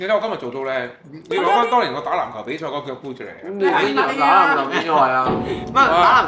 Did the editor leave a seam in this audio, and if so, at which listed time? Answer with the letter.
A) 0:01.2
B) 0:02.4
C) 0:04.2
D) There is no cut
D